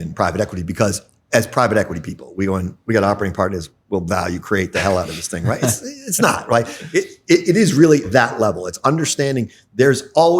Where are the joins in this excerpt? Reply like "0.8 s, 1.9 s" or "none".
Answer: none